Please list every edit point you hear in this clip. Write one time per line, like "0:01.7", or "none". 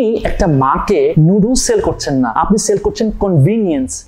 none